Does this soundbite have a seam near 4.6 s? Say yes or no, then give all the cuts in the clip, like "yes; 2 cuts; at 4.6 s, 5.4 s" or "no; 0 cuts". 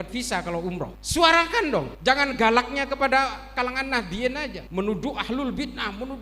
yes; 3 cuts; at 1.0 s, 1.9 s, 4.6 s